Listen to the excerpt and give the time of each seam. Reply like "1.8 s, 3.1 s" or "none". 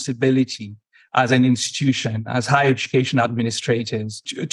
none